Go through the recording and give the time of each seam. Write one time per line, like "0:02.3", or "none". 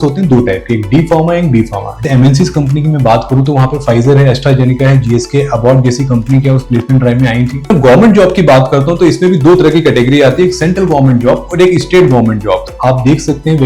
0:02.0
0:07.7
0:12.7